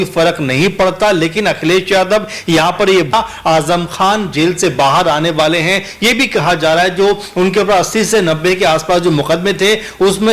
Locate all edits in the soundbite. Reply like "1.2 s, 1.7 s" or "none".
3.1 s